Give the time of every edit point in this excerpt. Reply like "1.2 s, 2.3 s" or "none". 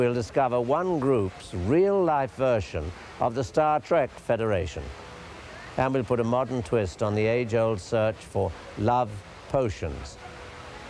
9.2 s